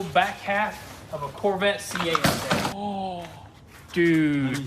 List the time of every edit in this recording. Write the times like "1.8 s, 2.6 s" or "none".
2.7 s